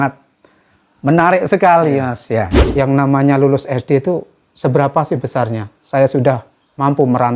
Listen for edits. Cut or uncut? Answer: cut